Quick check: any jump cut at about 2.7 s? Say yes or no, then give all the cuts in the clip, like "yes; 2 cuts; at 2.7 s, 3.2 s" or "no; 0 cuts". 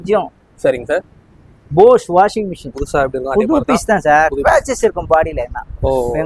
yes; 1 cut; at 2.7 s